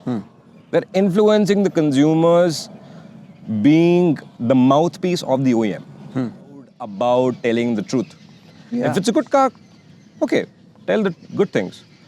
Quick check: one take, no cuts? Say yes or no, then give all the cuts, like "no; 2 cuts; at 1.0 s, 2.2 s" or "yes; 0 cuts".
no; 1 cut; at 6.8 s